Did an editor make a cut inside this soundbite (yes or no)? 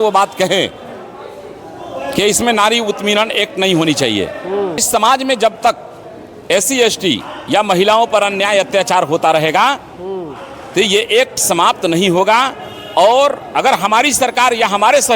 yes